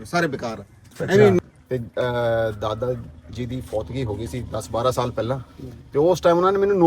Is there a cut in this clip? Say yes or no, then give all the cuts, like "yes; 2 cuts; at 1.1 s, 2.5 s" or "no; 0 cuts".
yes; 1 cut; at 1.4 s